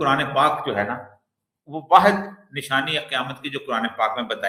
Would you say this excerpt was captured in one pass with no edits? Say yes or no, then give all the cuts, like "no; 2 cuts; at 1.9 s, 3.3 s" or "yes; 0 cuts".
yes; 0 cuts